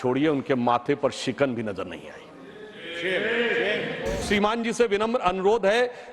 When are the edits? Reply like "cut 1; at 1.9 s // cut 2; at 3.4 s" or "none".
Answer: cut 1; at 4.2 s